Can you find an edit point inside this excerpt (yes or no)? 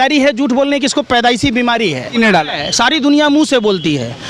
yes